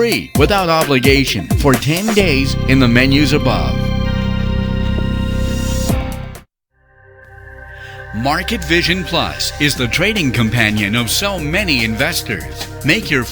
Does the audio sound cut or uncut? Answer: cut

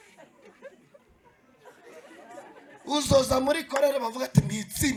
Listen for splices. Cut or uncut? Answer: uncut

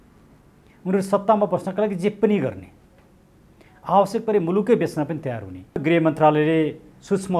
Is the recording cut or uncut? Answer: cut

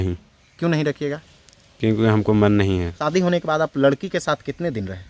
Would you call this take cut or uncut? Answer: cut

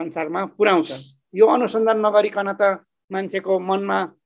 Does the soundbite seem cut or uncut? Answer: uncut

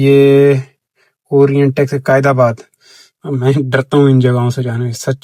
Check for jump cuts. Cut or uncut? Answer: uncut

